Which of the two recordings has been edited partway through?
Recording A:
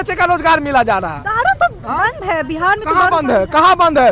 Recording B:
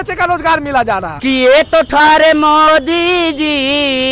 B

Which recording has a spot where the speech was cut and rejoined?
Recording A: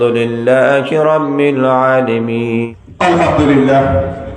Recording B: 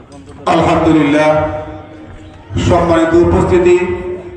A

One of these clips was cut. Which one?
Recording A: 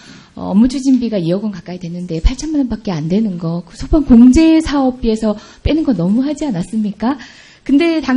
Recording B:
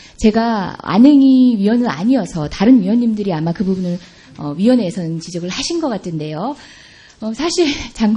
A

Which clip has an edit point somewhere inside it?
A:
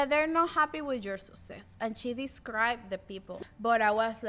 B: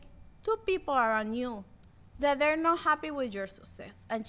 A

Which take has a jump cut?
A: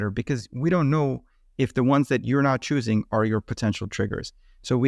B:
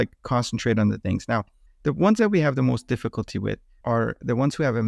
B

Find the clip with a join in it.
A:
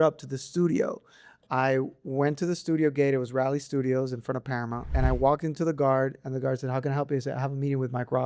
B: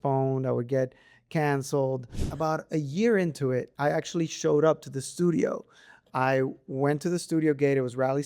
B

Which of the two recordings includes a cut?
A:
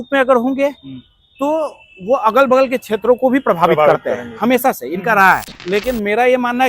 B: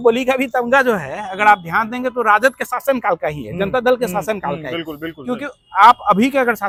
A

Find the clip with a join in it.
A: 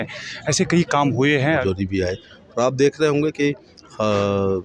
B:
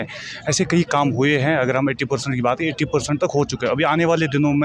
A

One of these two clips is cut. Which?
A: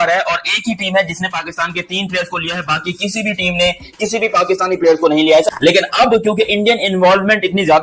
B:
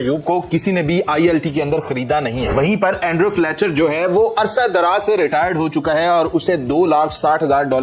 A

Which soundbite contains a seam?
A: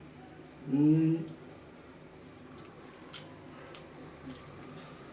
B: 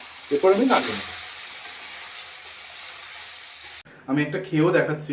B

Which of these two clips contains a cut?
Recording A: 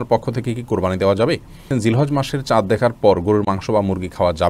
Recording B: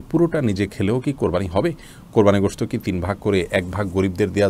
A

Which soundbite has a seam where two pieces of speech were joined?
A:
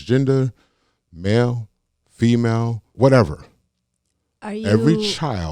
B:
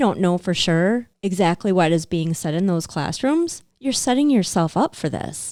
A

